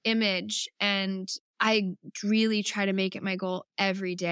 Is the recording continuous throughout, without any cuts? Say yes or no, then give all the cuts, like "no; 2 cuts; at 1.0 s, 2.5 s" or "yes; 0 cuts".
no; 1 cut; at 1.4 s